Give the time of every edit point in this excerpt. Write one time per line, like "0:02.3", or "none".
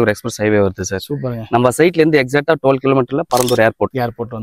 none